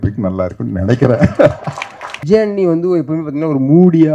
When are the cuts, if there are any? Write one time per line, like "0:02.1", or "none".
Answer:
0:02.2